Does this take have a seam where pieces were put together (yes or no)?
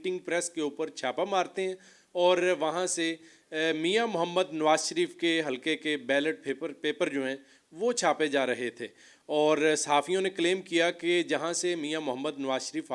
no